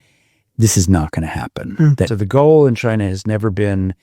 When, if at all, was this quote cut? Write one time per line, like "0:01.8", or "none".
0:02.1